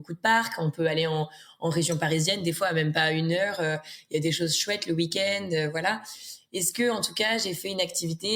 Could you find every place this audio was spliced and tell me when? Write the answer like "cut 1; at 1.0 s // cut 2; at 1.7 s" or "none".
none